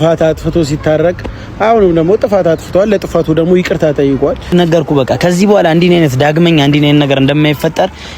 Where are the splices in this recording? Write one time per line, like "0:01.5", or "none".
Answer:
0:04.5